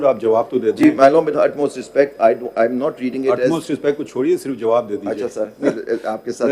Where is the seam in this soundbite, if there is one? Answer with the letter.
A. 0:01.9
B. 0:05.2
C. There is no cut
C